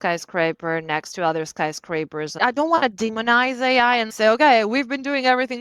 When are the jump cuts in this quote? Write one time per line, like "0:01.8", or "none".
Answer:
0:02.4
0:04.1